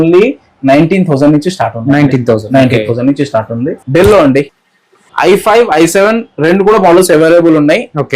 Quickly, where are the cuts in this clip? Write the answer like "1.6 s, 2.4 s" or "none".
3.8 s